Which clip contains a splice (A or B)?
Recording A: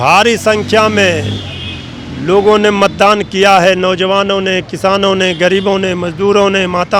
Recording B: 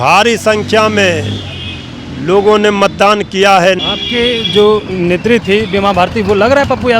B